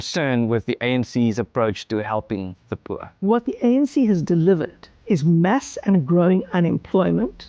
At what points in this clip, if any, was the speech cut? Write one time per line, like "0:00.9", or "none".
0:03.2